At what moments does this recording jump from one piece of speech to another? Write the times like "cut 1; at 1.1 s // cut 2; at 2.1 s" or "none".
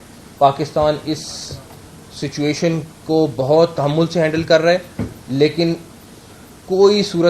none